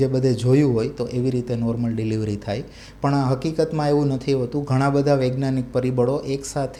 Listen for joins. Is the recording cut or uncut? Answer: uncut